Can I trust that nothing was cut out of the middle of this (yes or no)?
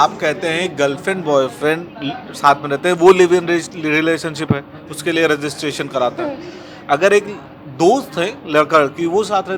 yes